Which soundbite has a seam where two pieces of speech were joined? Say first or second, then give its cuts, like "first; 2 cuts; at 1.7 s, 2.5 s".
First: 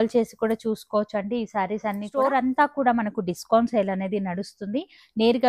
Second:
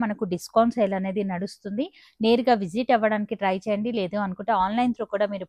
first; 1 cut; at 2.1 s